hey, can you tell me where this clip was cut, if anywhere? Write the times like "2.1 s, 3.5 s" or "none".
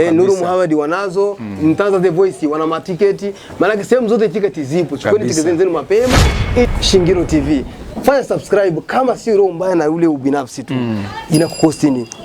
6.7 s